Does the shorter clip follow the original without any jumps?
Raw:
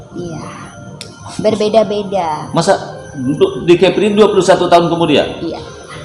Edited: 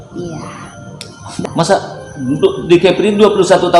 no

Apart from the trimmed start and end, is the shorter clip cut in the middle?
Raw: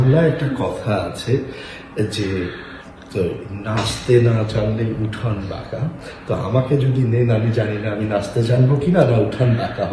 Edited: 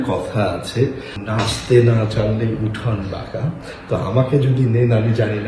yes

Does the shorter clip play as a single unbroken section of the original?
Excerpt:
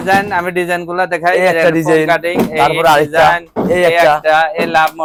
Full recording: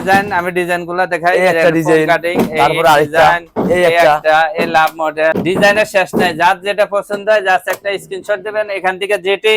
yes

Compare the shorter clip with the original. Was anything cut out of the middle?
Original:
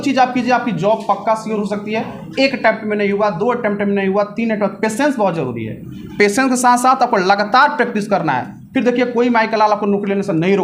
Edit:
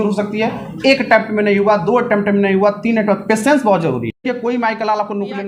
yes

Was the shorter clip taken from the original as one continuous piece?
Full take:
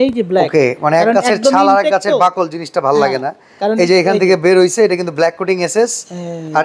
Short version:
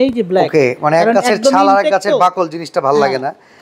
yes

